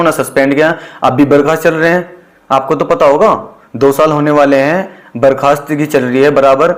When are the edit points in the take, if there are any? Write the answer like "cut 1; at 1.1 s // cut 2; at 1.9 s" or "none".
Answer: none